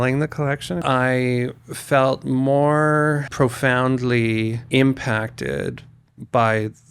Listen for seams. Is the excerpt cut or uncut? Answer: cut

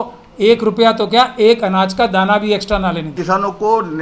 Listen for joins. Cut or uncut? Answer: cut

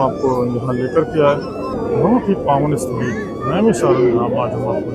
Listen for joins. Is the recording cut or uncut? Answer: cut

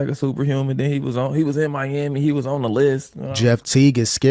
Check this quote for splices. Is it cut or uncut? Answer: cut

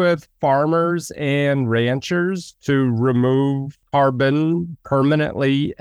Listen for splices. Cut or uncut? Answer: cut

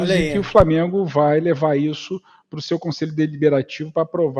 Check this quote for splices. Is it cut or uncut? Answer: uncut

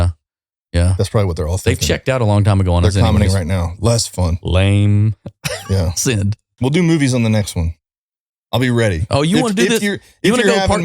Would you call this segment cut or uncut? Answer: cut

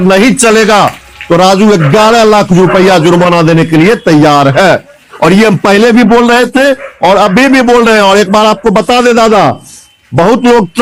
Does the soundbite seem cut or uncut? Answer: uncut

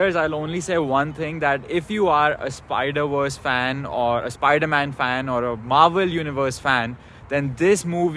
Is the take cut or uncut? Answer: uncut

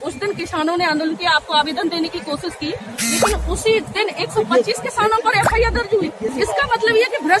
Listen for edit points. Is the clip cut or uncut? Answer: cut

